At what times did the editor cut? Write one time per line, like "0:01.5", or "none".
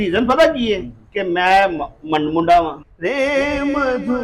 0:02.9